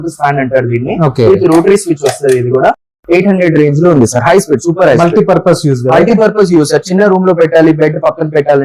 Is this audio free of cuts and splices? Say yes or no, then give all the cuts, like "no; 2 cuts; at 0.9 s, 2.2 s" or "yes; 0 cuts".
yes; 0 cuts